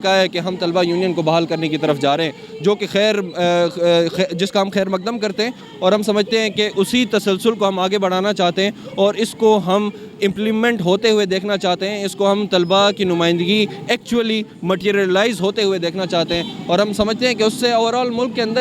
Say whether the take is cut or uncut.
uncut